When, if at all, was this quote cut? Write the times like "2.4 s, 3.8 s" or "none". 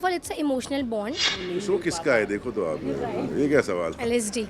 1.3 s